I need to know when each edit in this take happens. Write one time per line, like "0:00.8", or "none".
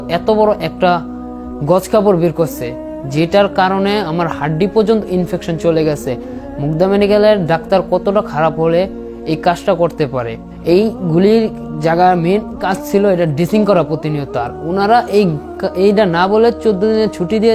none

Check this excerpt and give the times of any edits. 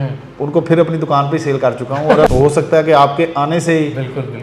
0:02.3

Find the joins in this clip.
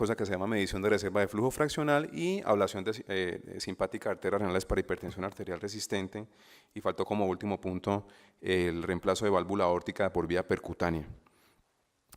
0:09.5

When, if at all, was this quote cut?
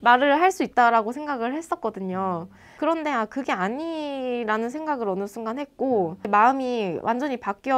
none

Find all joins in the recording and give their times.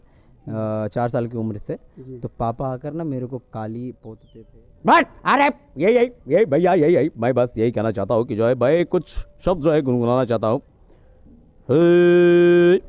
0:04.1

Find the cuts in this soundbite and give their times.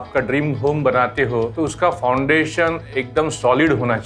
0:01.5

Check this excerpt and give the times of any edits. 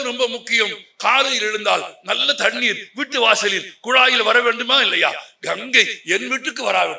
none

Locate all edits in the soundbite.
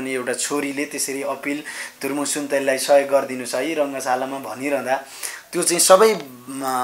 none

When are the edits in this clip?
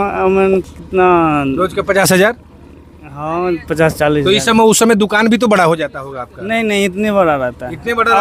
none

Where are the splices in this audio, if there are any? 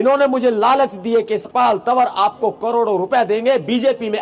0:01.5

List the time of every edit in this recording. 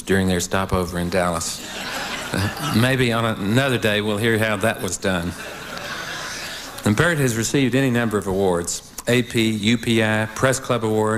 0:09.1

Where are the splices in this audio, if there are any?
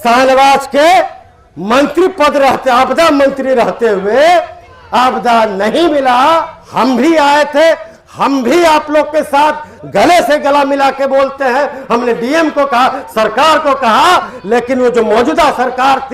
0:06.6

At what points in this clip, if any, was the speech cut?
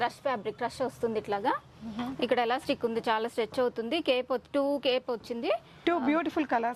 0:05.7

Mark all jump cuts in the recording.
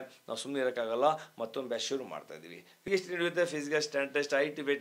0:02.8

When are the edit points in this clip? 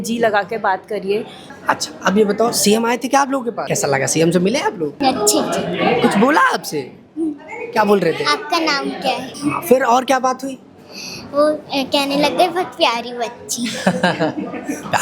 0:01.6
0:03.6
0:05.0
0:09.3

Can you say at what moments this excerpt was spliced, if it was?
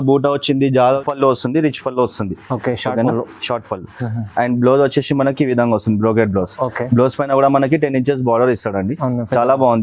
0:01.0

